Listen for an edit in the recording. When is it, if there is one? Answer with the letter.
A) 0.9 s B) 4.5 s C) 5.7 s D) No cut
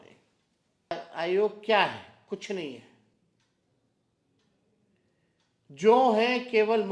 A